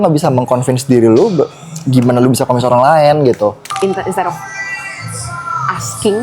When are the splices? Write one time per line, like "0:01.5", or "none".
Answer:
0:03.7